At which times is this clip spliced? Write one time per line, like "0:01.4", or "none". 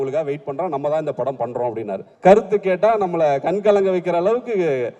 0:02.0